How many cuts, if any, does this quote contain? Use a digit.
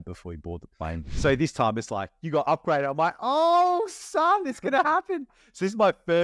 1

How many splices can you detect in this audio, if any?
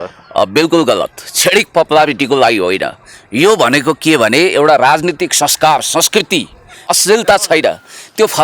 1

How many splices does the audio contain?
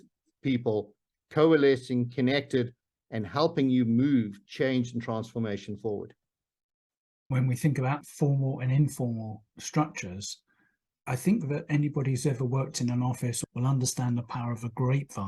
1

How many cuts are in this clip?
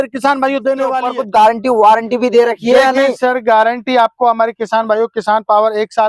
1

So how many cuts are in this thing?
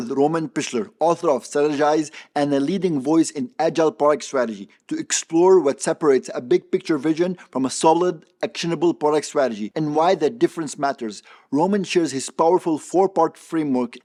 0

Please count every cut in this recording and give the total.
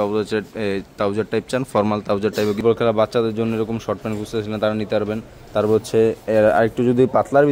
1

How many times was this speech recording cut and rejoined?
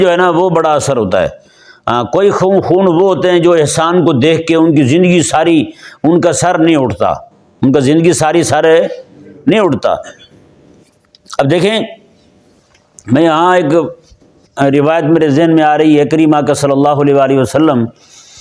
0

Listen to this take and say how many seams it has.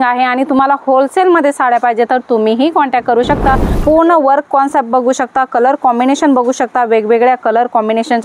1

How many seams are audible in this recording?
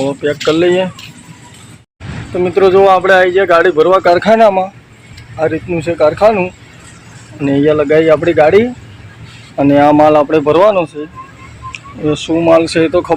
1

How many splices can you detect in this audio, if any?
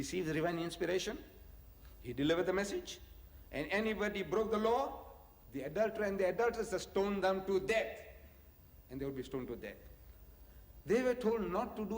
1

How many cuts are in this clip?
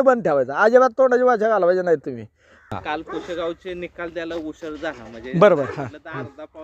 1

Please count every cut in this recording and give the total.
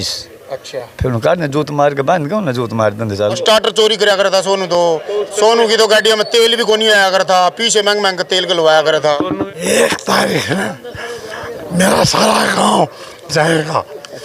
2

